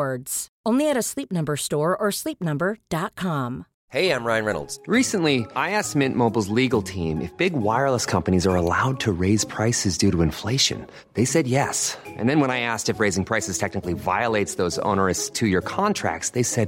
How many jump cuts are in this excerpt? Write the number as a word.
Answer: one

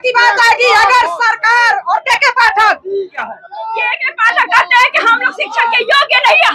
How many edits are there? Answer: one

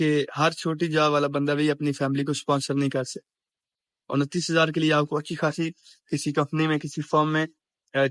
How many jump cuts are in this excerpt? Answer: zero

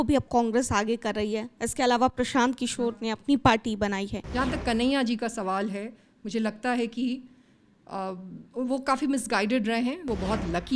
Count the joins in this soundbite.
two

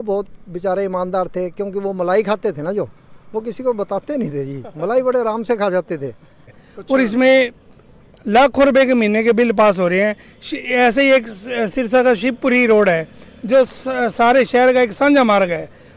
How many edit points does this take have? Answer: one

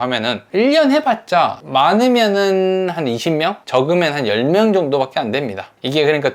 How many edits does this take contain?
zero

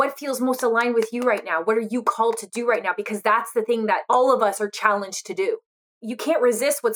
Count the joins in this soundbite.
two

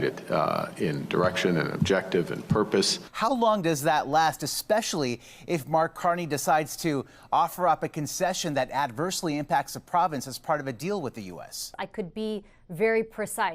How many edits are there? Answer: two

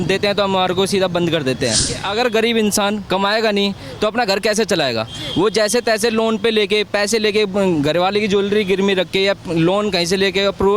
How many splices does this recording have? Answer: one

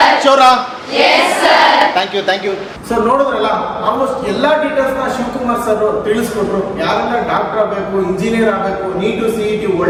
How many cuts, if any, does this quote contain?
zero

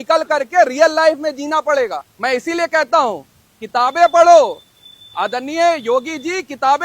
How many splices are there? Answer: one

